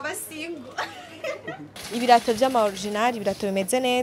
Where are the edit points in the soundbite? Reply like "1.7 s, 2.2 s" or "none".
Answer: 1.7 s